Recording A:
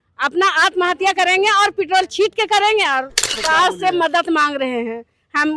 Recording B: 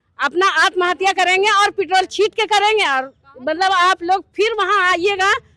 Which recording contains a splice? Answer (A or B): A